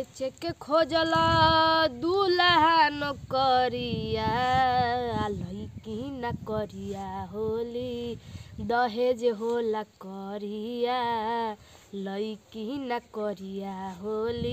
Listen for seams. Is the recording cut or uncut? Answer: uncut